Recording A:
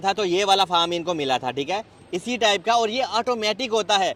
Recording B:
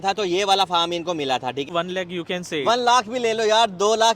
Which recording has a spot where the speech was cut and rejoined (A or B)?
B